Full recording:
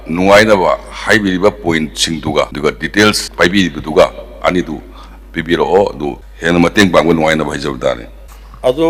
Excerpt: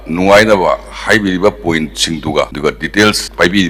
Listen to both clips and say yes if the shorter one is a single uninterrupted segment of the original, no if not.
yes